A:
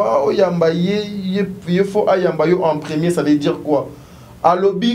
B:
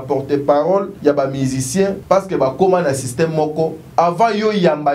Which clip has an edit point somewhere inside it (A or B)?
B